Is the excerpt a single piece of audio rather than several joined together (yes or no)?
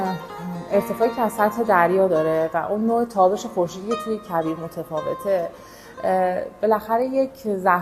yes